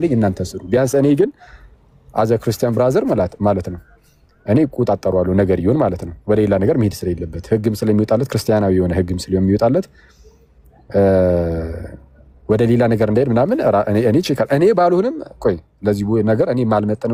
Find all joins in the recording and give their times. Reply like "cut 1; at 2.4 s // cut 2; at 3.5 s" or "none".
none